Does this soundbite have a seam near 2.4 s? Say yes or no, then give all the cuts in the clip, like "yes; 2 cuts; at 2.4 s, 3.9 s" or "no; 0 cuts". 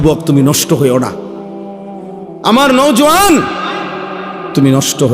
yes; 2 cuts; at 1.1 s, 2.4 s